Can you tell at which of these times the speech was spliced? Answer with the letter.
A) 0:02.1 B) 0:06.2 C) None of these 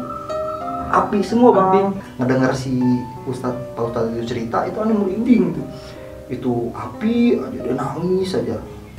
A